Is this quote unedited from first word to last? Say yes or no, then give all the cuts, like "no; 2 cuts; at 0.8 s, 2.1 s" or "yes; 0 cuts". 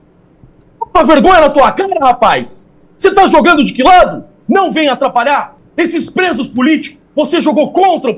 no; 3 cuts; at 4.3 s, 5.6 s, 7.0 s